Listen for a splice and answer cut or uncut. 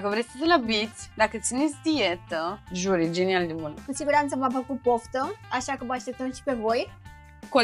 cut